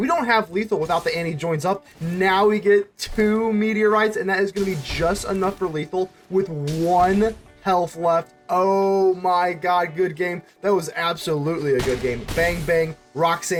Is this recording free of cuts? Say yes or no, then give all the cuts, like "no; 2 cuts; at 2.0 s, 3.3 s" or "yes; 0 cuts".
yes; 0 cuts